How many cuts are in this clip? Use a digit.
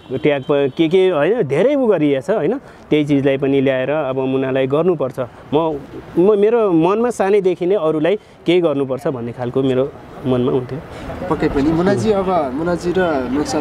0